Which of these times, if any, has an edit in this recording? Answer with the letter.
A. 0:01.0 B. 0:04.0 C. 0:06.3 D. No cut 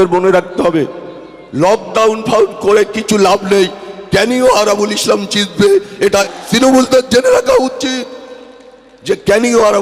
C